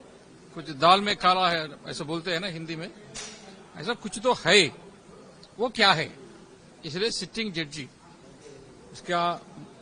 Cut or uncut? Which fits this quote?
uncut